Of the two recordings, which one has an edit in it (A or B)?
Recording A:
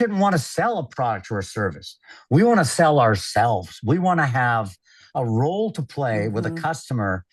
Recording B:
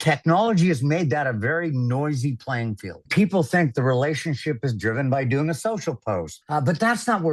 B